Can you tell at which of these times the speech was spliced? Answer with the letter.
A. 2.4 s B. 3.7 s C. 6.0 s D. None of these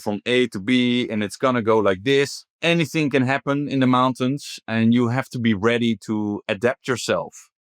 A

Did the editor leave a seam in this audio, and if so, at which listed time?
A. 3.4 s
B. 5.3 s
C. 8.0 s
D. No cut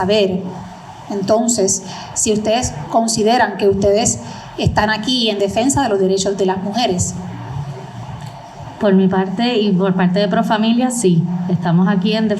C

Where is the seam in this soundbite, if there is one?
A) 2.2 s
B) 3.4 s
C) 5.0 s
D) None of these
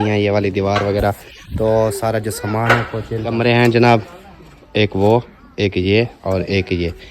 B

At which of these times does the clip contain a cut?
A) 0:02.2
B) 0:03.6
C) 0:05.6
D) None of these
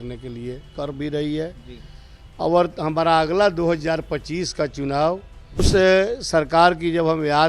C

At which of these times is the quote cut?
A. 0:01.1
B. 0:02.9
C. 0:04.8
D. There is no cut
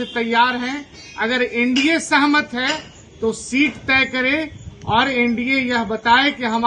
D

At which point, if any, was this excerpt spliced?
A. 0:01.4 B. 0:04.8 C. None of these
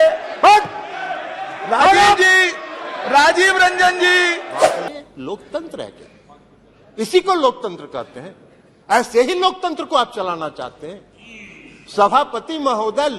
B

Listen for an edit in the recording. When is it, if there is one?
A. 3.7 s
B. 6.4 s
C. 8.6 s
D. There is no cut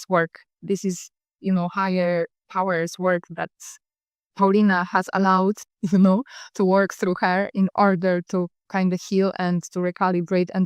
C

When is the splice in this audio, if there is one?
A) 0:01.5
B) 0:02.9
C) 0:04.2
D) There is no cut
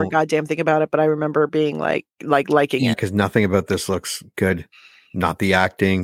B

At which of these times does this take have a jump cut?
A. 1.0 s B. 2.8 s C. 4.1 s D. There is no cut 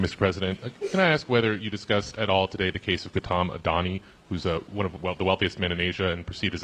D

